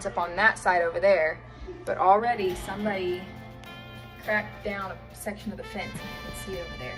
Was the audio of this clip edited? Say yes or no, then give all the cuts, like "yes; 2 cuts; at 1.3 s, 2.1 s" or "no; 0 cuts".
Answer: no; 0 cuts